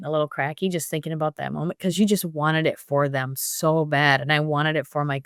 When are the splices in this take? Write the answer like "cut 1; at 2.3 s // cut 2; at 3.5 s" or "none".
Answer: none